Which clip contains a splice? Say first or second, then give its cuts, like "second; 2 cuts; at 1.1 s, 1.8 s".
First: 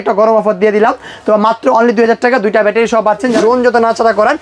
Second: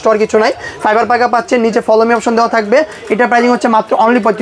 first; 1 cut; at 3.4 s